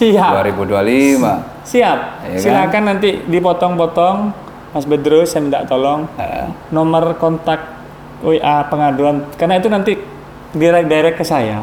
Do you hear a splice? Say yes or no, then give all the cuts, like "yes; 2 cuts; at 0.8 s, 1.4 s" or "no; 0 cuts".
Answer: no; 0 cuts